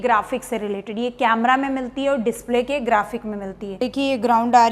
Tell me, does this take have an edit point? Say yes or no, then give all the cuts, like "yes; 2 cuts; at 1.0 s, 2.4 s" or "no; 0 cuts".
yes; 1 cut; at 3.7 s